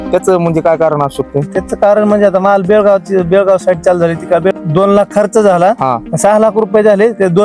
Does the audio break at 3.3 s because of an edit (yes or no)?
no